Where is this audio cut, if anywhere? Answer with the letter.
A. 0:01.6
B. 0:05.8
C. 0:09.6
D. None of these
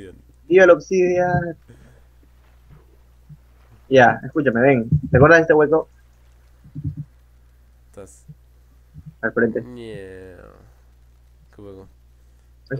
A